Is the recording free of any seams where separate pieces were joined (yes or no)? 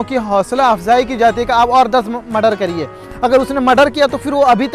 no